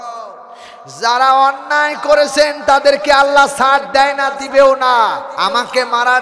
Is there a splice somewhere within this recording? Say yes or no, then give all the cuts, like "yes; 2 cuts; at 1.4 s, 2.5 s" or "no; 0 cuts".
yes; 1 cut; at 5.3 s